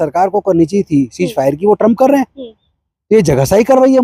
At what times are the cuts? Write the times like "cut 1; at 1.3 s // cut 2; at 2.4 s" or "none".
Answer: none